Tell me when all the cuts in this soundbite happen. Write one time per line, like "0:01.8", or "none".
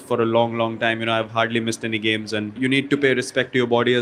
0:02.6